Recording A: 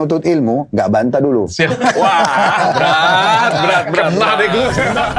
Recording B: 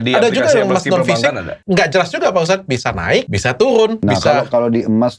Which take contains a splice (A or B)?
B